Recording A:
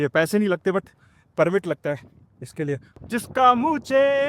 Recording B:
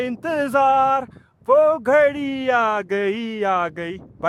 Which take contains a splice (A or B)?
A